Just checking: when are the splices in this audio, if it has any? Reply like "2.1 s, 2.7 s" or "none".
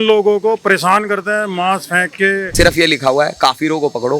2.5 s